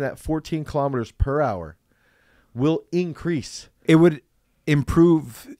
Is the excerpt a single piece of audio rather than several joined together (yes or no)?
no